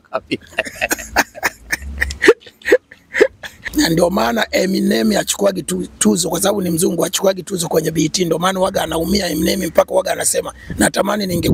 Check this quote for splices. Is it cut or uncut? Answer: cut